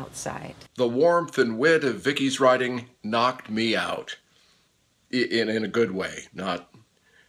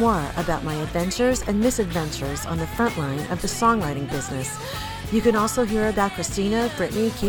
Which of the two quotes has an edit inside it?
first; 1 cut; at 2.7 s

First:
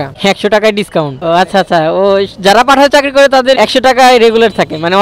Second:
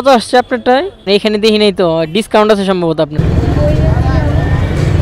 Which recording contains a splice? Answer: second; 1 cut; at 3.1 s

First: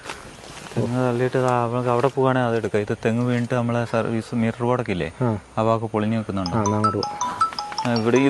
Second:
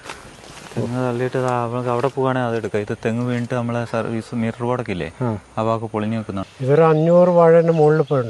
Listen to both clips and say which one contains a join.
second; 1 cut; at 6.5 s

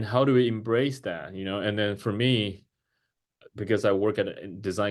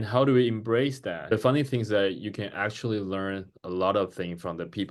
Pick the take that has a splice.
second; 1 cut; at 1.3 s

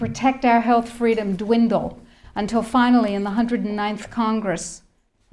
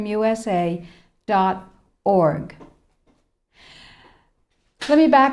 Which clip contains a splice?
second; 1 cut; at 3.1 s

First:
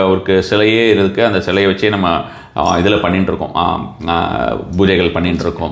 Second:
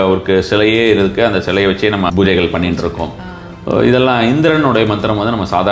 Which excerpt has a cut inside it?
second; 1 cut; at 2.1 s

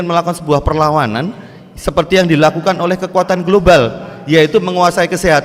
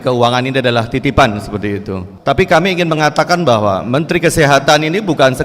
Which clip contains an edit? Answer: second; 1 cut; at 2.1 s

